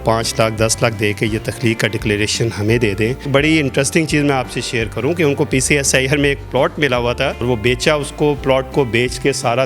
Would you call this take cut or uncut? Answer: cut